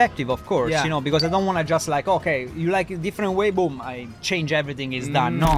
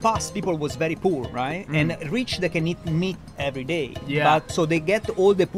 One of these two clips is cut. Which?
second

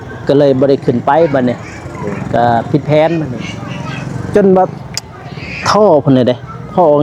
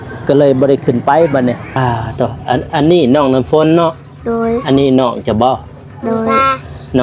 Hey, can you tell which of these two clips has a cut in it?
second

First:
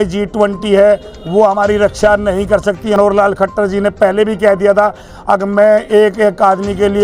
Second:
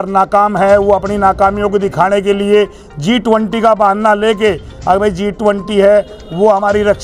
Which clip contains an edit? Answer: first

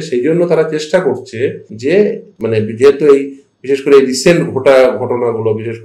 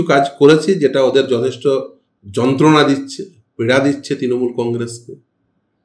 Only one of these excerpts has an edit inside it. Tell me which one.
first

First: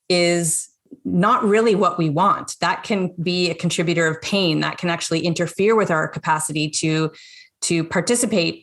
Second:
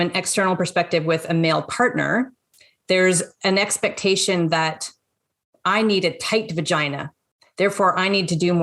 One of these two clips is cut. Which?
first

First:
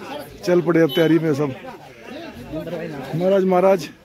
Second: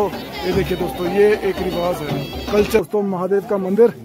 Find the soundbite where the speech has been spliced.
second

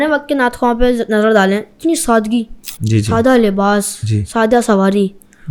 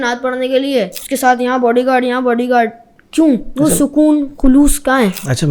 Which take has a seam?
second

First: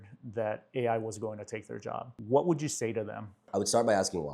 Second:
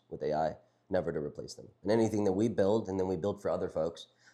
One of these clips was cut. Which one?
first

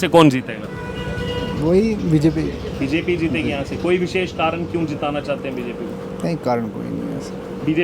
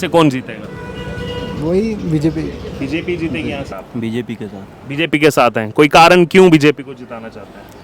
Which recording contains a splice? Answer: second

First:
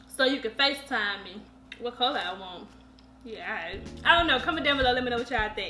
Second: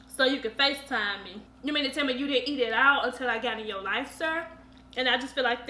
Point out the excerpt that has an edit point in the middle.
second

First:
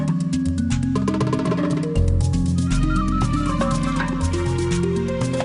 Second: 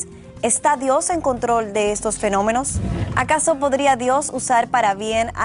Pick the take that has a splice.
first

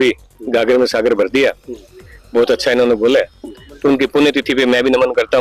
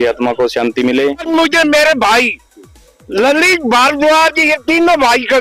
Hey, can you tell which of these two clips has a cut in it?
second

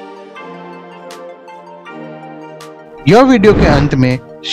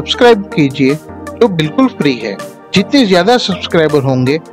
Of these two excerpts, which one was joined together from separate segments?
first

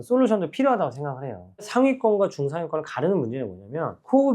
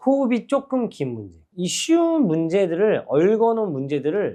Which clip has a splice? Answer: first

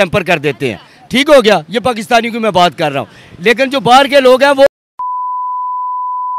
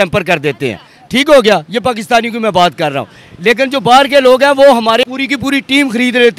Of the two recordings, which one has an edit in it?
second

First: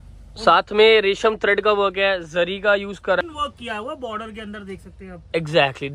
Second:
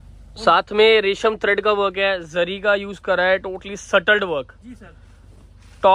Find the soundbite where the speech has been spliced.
first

